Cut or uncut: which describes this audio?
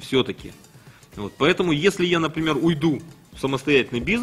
uncut